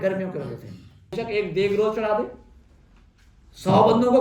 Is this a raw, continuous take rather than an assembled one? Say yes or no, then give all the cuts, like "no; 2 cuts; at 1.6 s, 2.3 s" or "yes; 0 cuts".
no; 1 cut; at 1.2 s